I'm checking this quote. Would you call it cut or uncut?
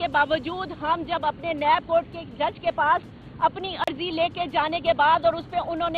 uncut